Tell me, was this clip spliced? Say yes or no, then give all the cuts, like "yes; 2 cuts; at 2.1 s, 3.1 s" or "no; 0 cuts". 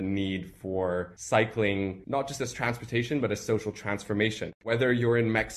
yes; 3 cuts; at 1.2 s, 2.0 s, 4.6 s